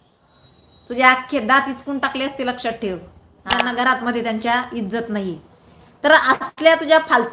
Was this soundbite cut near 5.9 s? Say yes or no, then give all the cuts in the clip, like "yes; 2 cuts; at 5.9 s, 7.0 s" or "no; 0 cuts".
no; 1 cut; at 3.6 s